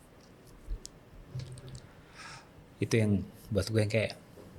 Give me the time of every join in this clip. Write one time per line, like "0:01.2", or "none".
none